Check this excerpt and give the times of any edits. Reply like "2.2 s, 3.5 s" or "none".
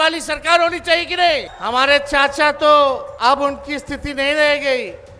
1.5 s, 3.1 s